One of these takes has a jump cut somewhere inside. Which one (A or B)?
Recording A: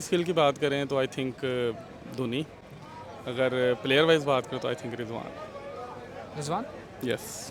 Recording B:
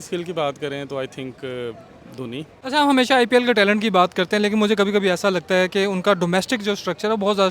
B